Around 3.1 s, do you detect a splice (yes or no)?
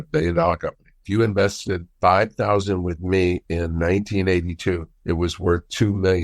no